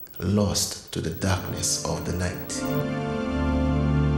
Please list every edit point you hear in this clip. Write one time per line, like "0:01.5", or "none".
0:02.6